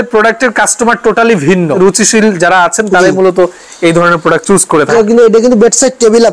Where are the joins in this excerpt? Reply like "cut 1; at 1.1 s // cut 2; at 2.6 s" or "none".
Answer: cut 1; at 1.8 s // cut 2; at 4.9 s

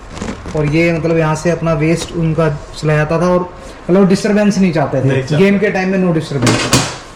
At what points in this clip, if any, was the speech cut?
none

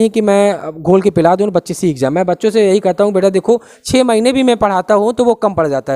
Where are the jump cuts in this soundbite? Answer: none

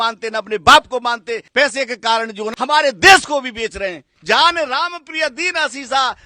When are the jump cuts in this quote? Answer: cut 1; at 1.4 s // cut 2; at 2.5 s // cut 3; at 4.1 s

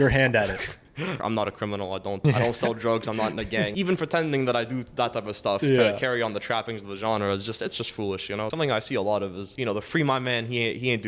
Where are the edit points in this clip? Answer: cut 1; at 1.2 s // cut 2; at 2.2 s // cut 3; at 3.7 s // cut 4; at 8.5 s // cut 5; at 9.4 s

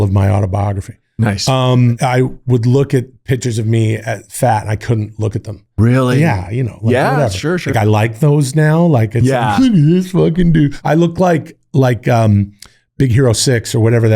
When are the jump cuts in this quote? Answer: cut 1; at 2.0 s // cut 2; at 7.7 s // cut 3; at 10.7 s

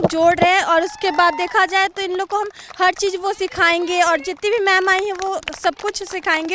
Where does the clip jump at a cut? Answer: none

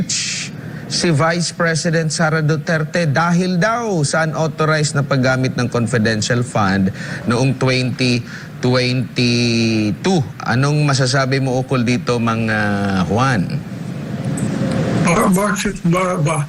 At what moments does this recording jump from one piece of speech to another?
none

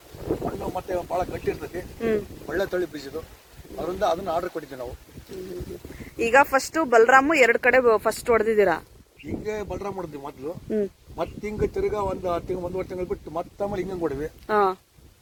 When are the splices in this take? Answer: none

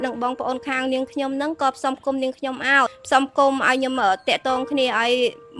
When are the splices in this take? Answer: cut 1; at 3.0 s

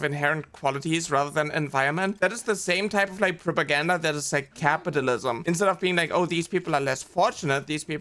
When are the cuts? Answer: cut 1; at 2.1 s // cut 2; at 5.4 s

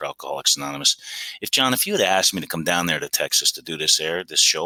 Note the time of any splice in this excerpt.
none

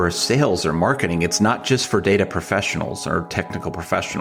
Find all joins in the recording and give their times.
none

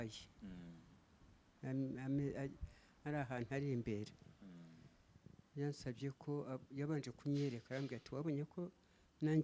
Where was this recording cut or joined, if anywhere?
none

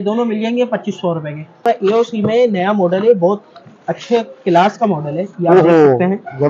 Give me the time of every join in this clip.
cut 1; at 1.6 s

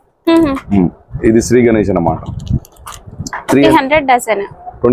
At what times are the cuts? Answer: cut 1; at 3.7 s

